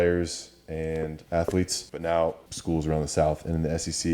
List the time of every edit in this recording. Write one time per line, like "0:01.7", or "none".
0:01.2
0:01.8
0:02.5